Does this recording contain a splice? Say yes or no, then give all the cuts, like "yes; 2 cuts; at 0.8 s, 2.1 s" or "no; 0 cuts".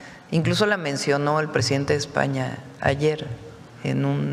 no; 0 cuts